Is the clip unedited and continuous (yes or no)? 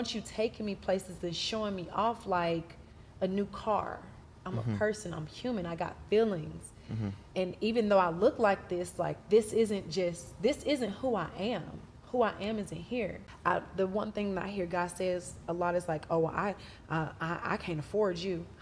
no